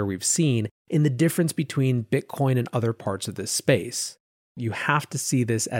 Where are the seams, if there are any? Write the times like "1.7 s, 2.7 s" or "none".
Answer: 4.6 s